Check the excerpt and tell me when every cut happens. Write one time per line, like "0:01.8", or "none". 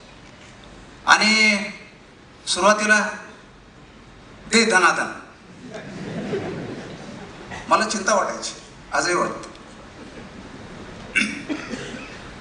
none